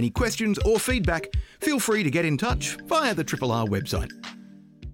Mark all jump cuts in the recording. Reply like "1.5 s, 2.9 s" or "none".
4.0 s